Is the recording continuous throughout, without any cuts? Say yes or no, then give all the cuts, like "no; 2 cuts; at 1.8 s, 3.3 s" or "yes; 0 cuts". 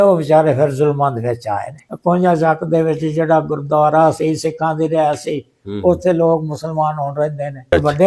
yes; 0 cuts